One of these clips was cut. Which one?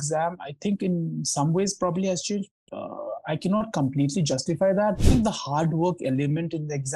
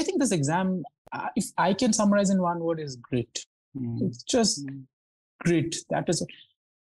first; 1 cut; at 5.0 s

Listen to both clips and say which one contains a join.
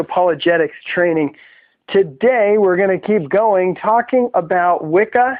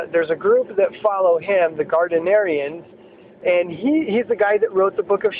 second; 1 cut; at 3.9 s

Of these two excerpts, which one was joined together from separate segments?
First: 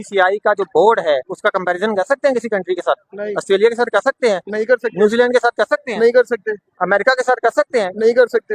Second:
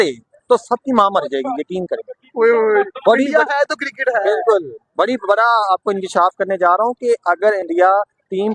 first; 1 cut; at 1.3 s

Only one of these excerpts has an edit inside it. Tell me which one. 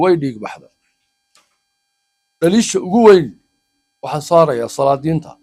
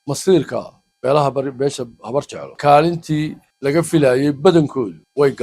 second; 1 cut; at 2.6 s

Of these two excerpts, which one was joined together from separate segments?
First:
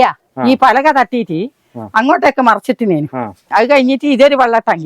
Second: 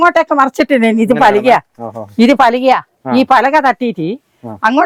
first; 1 cut; at 3.4 s

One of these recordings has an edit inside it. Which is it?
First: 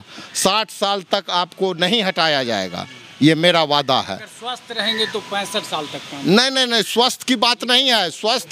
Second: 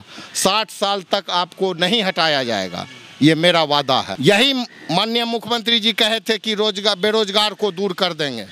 second; 1 cut; at 4.1 s

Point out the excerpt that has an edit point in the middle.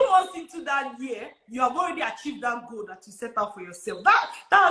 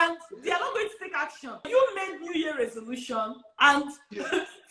second; 2 cuts; at 1.7 s, 3.4 s

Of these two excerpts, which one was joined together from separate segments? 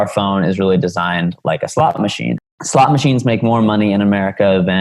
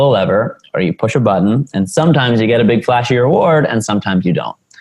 first; 1 cut; at 2.4 s

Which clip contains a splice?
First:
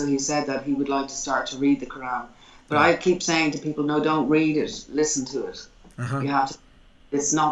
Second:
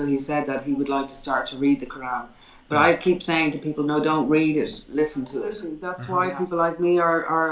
second; 1 cut; at 5.9 s

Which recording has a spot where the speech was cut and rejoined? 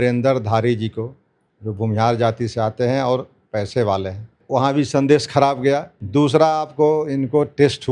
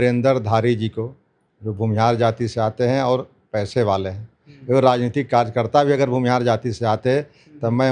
first; 2 cuts; at 4.4 s, 6.0 s

